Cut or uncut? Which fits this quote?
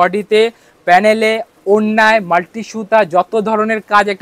uncut